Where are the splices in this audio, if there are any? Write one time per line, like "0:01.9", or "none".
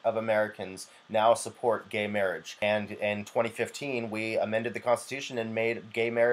0:02.6

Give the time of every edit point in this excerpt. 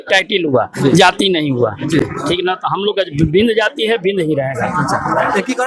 none

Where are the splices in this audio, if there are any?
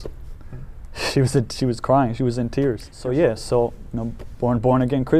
0:02.9

